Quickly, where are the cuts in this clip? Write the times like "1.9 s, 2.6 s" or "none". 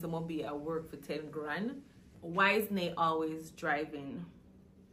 2.1 s